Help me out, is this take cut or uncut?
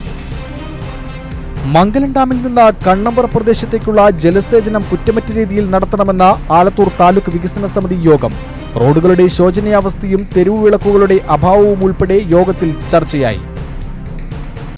uncut